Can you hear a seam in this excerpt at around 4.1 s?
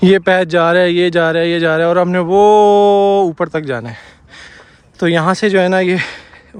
no; 0 cuts

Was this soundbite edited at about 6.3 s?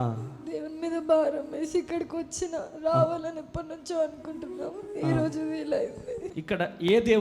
yes; 1 cut; at 6.3 s

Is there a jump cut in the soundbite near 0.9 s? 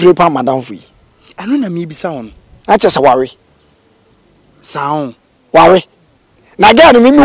yes; 1 cut; at 0.9 s

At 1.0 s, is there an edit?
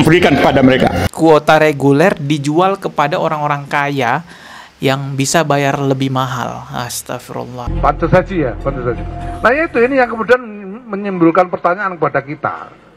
yes; 2 cuts; at 1.0 s, 7.6 s

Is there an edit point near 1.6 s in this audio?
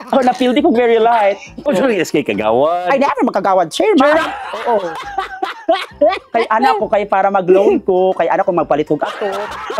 yes; 1 cut; at 1.6 s

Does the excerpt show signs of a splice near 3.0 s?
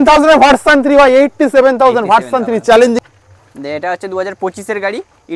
yes; 1 cut; at 3.0 s

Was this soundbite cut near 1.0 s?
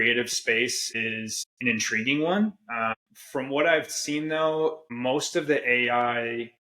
yes; 3 cuts; at 1.0 s, 2.9 s, 4.9 s

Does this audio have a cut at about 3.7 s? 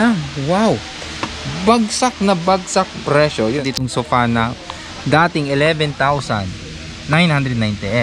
yes; 1 cut; at 3.7 s

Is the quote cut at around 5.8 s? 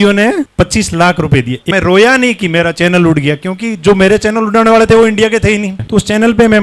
yes; 2 cuts; at 1.6 s, 5.8 s

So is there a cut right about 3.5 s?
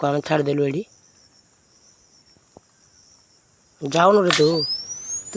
no; 0 cuts

